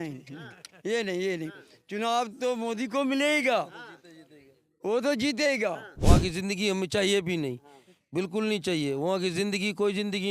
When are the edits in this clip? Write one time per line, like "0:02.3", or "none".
0:05.9

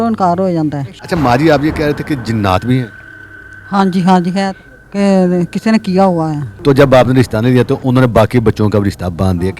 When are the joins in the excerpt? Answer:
0:00.9
0:06.5

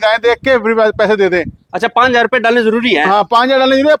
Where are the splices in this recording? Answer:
none

